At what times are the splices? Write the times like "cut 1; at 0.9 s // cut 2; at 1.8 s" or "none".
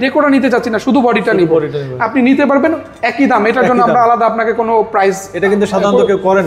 none